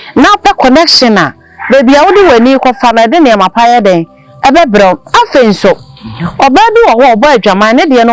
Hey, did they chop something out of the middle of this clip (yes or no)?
no